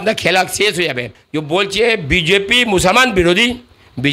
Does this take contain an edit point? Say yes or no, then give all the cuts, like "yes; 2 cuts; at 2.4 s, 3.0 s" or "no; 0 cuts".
yes; 1 cut; at 1.2 s